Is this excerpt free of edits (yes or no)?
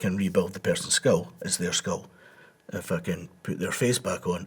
yes